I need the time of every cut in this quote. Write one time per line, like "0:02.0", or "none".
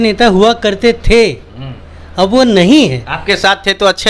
none